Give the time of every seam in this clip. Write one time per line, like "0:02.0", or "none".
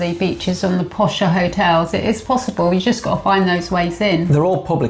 none